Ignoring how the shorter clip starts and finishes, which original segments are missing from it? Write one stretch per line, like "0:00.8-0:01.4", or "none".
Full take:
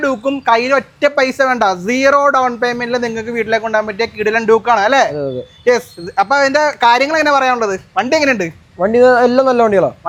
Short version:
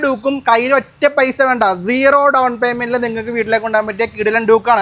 none